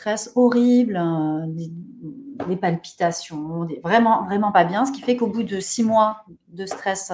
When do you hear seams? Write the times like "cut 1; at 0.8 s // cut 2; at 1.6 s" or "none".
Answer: none